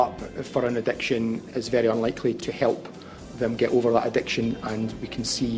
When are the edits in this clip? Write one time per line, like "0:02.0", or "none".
0:01.5
0:02.4